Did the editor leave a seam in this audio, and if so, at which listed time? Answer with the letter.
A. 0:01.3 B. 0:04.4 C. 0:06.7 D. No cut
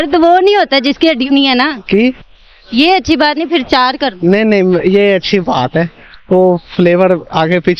A